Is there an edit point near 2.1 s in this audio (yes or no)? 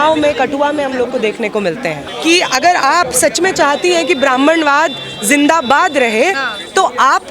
yes